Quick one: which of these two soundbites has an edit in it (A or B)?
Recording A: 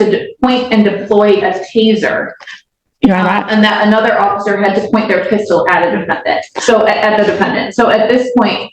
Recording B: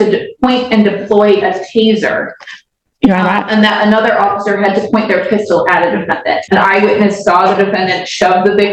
B